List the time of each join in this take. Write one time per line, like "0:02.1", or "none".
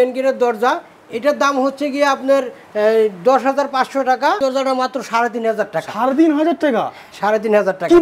0:04.4

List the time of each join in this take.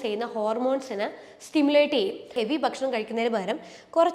0:02.3

